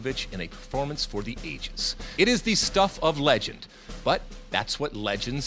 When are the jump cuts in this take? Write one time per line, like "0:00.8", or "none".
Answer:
0:02.1

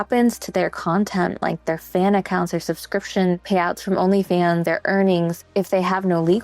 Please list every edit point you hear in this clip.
0:03.4
0:04.6
0:05.5

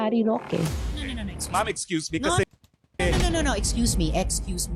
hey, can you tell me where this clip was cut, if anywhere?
none

